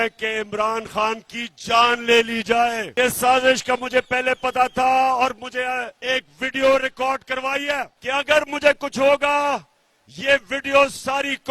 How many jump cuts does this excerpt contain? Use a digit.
2